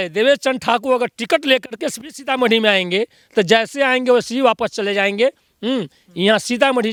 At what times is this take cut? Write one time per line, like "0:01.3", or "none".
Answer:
none